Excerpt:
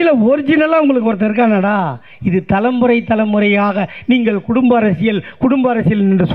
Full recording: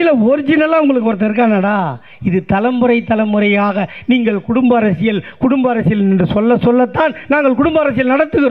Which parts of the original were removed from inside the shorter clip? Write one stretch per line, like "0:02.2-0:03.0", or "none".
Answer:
none